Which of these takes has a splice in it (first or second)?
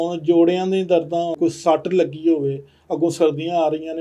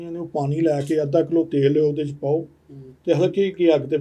first